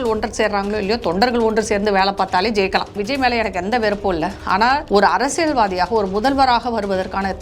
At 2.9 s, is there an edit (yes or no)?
yes